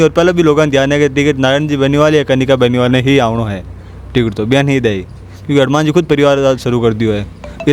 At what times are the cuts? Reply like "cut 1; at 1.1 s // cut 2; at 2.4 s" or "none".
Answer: none